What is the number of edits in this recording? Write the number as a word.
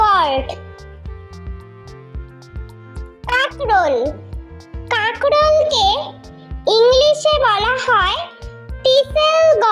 zero